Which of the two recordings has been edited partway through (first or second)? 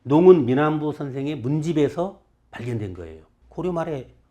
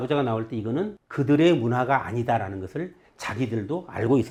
first